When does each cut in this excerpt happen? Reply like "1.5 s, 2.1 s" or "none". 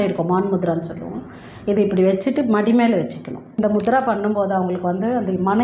3.6 s